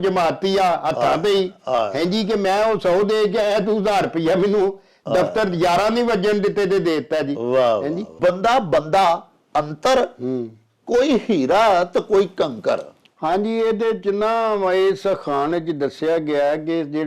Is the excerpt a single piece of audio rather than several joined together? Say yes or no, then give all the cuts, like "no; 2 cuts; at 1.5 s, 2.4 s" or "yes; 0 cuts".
no; 1 cut; at 8.1 s